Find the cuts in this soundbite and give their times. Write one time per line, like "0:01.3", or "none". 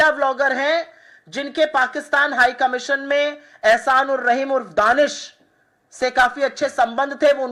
none